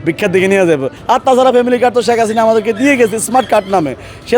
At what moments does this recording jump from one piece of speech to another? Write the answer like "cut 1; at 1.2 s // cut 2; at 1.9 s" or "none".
cut 1; at 1.0 s